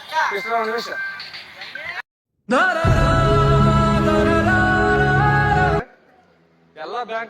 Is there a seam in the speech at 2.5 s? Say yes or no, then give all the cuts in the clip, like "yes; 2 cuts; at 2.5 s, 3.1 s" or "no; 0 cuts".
no; 1 cut; at 5.8 s